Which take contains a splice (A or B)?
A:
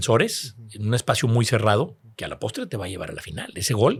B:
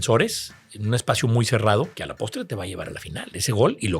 B